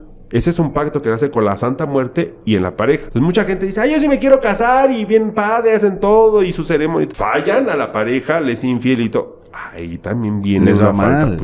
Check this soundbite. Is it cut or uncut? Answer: cut